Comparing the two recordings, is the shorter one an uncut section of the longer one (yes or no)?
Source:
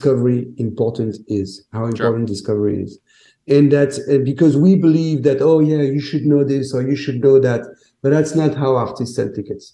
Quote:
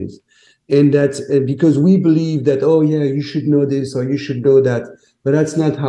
yes